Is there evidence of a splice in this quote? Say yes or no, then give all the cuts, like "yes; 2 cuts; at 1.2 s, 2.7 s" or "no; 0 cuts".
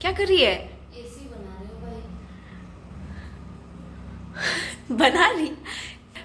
no; 0 cuts